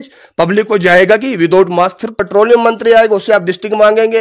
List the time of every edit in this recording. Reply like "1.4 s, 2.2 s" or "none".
2.1 s